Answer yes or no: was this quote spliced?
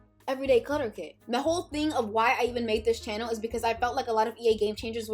yes